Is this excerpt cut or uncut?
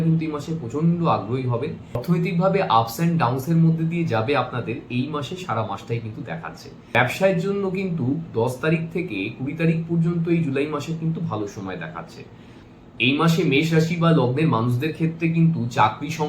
cut